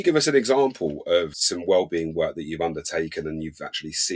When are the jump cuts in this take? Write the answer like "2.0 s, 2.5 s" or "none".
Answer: 1.4 s

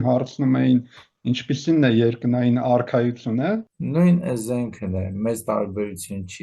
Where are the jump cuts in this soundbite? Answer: 3.7 s

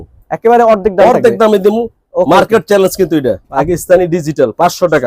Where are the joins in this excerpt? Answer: 3.5 s

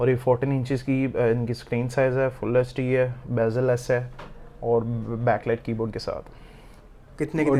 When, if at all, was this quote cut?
none

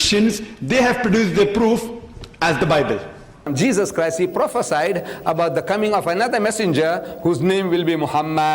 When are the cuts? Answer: 3.5 s

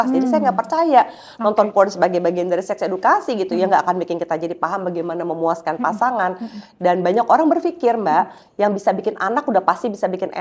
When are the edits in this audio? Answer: none

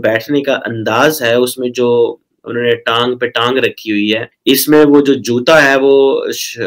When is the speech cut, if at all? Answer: none

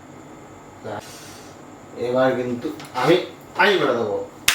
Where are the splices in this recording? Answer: 1.0 s

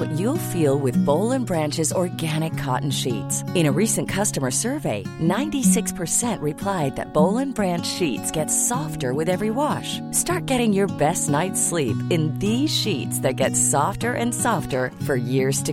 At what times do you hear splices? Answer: none

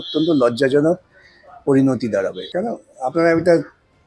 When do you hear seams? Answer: 2.5 s

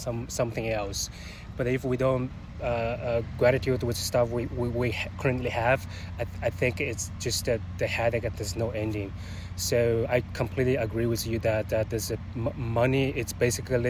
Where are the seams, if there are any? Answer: none

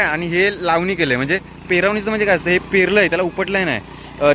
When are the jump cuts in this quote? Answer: none

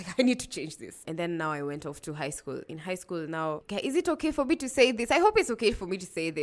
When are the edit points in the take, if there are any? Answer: 1.0 s

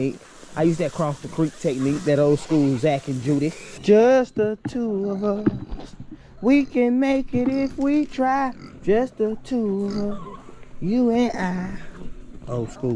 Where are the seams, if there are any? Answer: 3.7 s

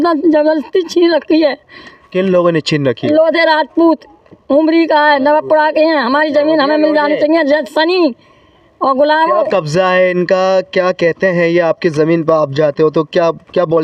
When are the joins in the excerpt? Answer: none

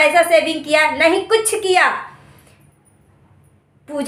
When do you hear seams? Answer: none

